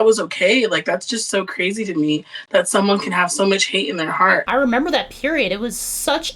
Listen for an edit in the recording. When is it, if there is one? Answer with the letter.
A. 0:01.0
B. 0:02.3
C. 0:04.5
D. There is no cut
C